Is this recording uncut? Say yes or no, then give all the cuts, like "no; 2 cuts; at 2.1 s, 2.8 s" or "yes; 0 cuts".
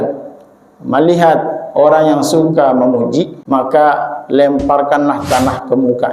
no; 1 cut; at 3.4 s